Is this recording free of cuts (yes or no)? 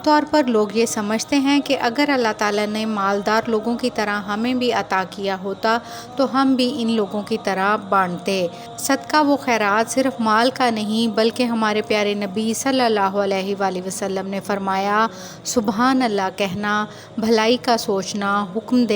yes